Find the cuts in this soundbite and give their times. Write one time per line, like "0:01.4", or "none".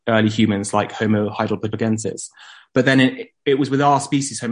0:01.4